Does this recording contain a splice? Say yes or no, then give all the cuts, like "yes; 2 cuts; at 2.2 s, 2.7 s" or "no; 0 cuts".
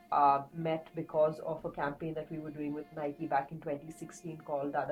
no; 0 cuts